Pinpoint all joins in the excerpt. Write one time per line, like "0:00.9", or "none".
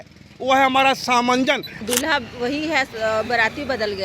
0:01.8